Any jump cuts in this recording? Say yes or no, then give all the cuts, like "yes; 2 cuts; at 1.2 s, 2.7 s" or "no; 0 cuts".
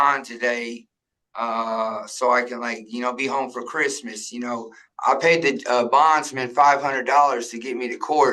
yes; 1 cut; at 4.8 s